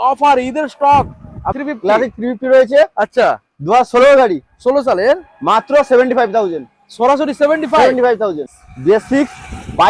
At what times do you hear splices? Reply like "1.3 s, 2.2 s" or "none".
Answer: 1.5 s, 8.5 s